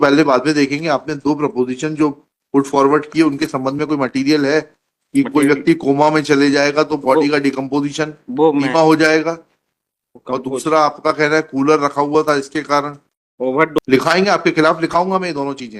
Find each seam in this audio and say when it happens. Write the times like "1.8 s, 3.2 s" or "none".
13.8 s